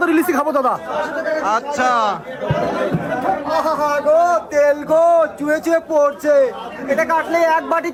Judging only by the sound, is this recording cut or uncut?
uncut